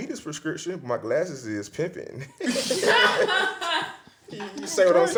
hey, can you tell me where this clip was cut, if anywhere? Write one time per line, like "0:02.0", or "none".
none